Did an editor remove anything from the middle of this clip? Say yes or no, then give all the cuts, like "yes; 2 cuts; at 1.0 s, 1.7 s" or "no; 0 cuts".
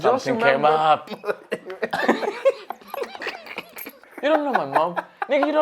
yes; 2 cuts; at 1.1 s, 4.1 s